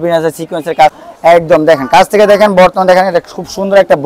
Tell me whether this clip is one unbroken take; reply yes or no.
no